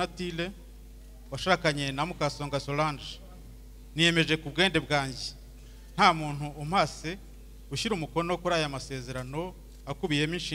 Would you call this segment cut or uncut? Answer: uncut